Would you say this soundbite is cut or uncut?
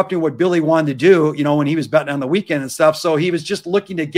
uncut